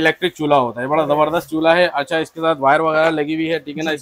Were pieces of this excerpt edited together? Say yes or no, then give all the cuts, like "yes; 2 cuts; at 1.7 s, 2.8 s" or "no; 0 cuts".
no; 0 cuts